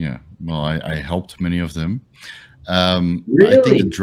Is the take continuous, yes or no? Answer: yes